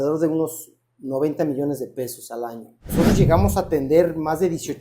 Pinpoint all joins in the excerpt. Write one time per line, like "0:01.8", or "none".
0:02.9